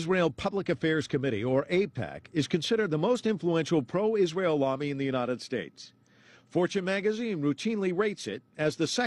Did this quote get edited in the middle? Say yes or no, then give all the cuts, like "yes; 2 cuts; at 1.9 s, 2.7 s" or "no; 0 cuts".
no; 0 cuts